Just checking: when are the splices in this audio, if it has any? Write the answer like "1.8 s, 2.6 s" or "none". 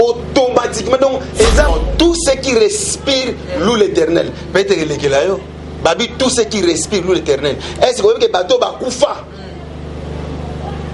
1.7 s